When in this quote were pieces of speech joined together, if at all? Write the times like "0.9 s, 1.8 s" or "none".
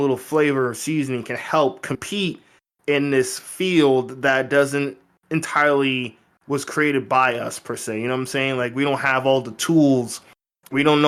none